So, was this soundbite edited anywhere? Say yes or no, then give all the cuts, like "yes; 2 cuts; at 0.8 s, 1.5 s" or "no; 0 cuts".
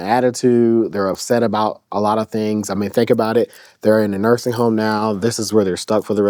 no; 0 cuts